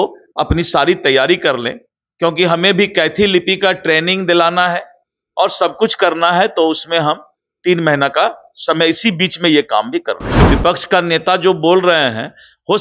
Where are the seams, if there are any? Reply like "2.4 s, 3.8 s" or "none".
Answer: 10.3 s